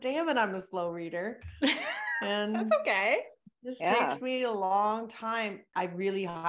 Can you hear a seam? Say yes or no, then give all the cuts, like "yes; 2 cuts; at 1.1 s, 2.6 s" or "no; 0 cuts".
no; 0 cuts